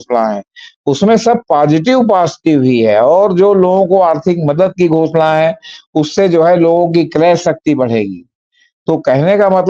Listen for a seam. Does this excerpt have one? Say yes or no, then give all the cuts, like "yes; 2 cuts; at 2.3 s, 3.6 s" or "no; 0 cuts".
no; 0 cuts